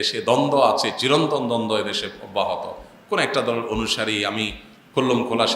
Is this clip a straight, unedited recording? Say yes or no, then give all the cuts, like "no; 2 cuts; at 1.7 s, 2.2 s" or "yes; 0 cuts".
yes; 0 cuts